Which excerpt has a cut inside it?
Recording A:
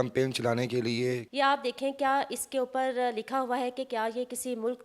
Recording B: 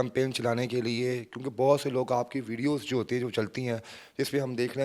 A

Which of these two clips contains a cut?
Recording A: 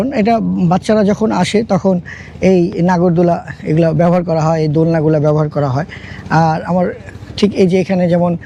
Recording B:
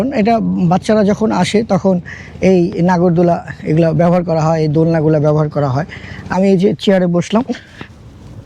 B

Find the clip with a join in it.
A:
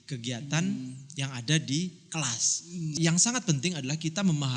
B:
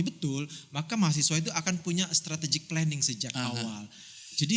A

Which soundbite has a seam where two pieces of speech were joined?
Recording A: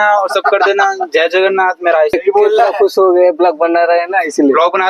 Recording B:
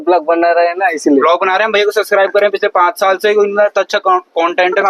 A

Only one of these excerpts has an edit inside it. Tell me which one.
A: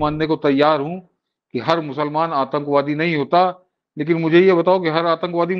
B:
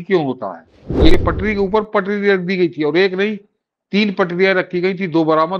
B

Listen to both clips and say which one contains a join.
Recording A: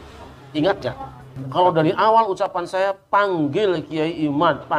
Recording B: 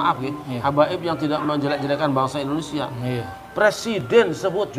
A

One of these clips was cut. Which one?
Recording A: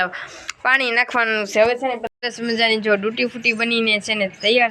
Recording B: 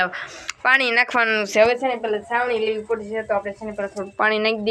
A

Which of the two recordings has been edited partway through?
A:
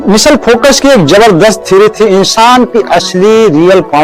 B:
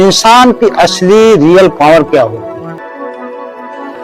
B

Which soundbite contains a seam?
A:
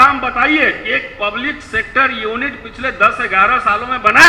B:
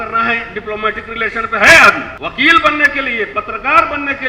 B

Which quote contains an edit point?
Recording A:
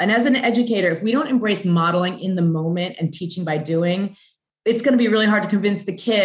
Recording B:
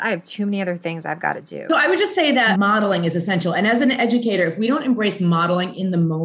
B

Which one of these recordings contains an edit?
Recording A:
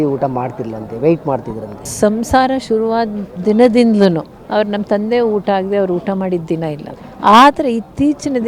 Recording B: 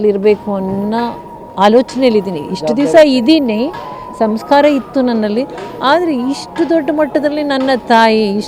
A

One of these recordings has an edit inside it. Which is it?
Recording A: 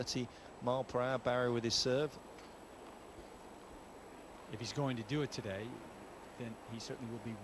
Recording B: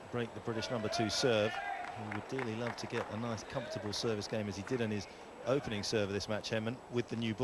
A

